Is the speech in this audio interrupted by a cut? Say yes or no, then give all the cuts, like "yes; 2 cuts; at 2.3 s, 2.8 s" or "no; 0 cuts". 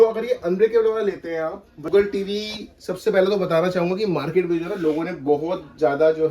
yes; 1 cut; at 1.9 s